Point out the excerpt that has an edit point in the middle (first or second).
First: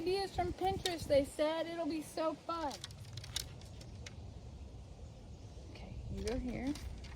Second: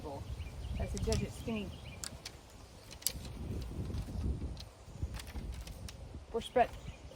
first